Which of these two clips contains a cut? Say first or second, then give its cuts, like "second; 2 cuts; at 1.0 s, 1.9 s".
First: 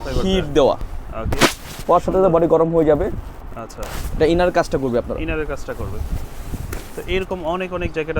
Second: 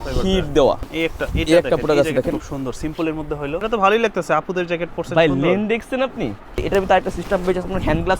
second; 3 cuts; at 0.9 s, 3.6 s, 6.6 s